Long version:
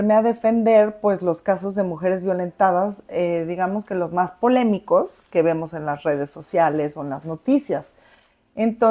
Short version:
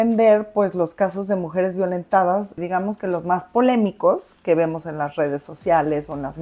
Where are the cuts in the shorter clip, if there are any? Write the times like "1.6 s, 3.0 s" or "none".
2.6 s